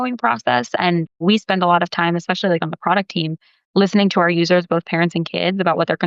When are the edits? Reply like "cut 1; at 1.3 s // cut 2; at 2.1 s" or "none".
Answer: cut 1; at 1.2 s